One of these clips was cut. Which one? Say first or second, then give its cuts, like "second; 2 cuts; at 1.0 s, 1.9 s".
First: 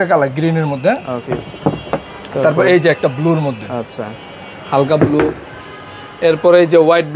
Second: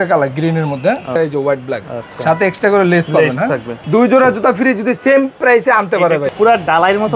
second; 3 cuts; at 1.1 s, 3.7 s, 6.3 s